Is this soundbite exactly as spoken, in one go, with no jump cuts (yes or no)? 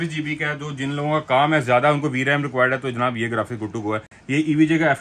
yes